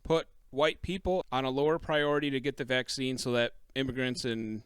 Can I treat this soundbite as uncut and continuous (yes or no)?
no